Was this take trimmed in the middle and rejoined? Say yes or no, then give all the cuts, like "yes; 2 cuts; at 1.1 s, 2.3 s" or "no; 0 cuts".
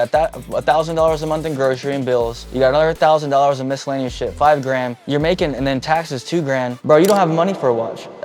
yes; 3 cuts; at 2.4 s, 5.0 s, 6.7 s